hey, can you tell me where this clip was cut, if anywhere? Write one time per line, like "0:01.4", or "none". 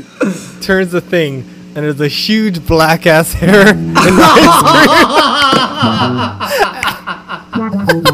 none